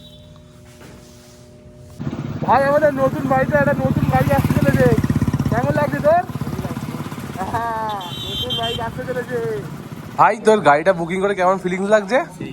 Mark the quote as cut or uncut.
cut